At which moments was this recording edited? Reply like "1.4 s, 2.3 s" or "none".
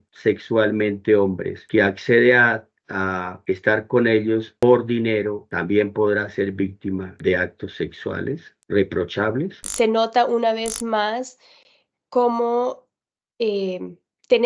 9.5 s

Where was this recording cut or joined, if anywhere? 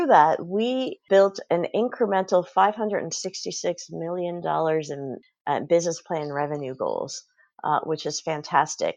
0.9 s

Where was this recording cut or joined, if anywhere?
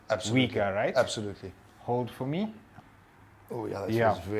2.7 s

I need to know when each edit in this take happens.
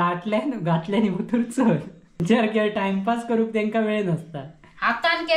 2.2 s

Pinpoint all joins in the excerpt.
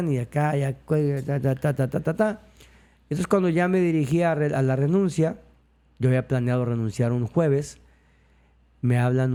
none

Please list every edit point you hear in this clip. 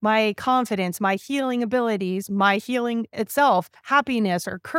3.8 s

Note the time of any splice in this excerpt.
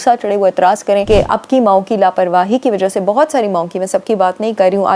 1.0 s

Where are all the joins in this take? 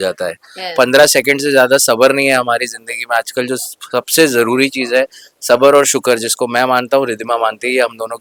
none

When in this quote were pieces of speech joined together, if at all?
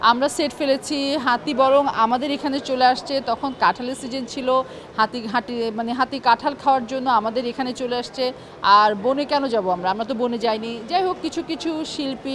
none

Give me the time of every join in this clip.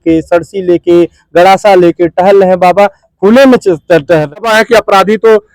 4.4 s

